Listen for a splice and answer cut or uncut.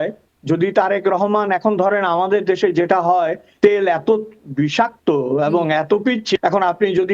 uncut